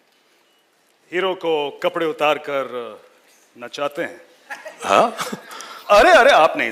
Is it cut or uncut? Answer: uncut